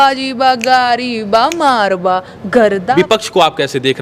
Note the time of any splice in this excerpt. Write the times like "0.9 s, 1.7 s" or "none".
2.9 s